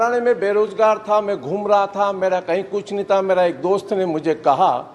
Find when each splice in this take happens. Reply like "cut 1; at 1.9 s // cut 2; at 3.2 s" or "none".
none